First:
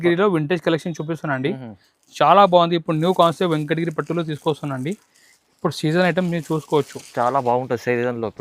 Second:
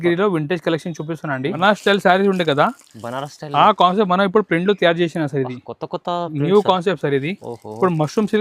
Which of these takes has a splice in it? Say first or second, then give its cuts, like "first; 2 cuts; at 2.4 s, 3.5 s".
second; 1 cut; at 1.6 s